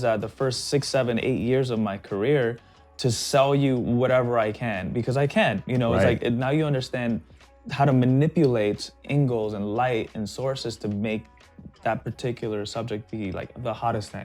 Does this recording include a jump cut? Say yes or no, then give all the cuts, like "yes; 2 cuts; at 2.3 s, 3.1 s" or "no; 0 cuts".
no; 0 cuts